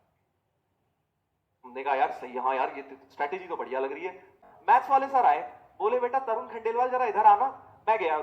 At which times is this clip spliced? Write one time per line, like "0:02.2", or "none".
0:04.4

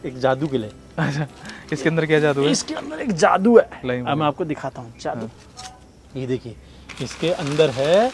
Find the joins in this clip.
none

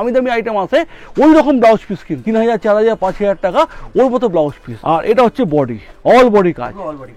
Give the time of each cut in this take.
0:02.1
0:04.7
0:05.8

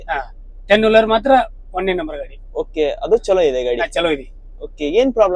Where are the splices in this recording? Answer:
none

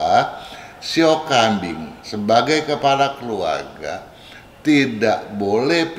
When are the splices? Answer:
none

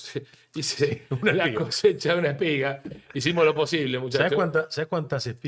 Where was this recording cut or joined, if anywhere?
none

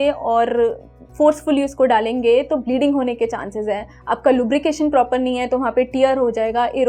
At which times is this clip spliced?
none

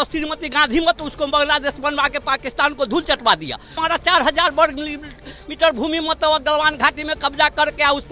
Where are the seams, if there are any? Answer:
0:03.8

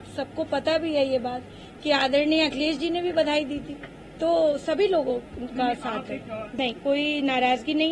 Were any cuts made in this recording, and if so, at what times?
0:06.6

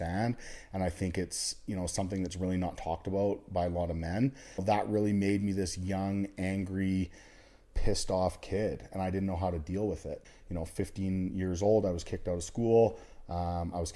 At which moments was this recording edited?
0:04.6
0:10.2

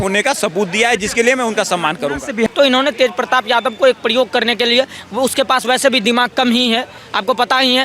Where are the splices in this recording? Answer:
0:02.5

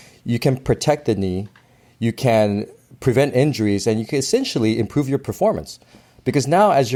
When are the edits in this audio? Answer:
none

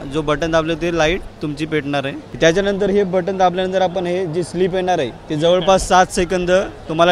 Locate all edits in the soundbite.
0:02.2

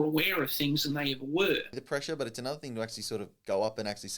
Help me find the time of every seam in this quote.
0:01.8

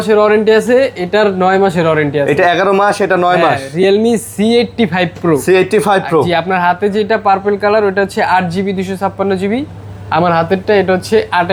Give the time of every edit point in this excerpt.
none

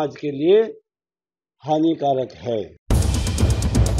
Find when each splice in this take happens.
0:02.8

